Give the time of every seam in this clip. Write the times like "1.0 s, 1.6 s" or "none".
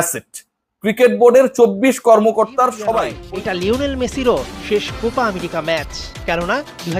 3.2 s